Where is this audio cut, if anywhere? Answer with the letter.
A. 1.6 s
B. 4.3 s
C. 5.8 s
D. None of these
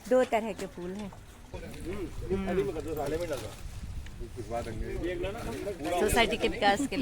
A